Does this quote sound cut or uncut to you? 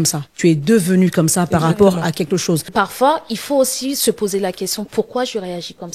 cut